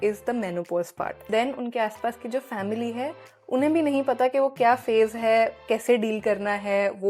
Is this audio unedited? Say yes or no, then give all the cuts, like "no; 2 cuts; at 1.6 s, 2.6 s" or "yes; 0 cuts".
no; 1 cut; at 1.3 s